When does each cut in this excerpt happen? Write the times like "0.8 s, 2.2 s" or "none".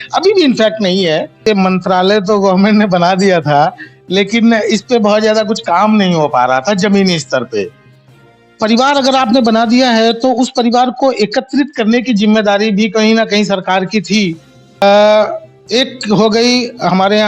1.4 s, 14.8 s